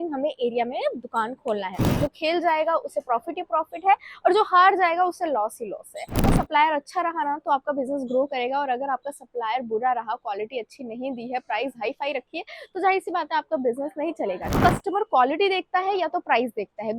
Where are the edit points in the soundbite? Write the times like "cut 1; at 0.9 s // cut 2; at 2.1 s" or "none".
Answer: cut 1; at 1.9 s // cut 2; at 6.3 s // cut 3; at 14.6 s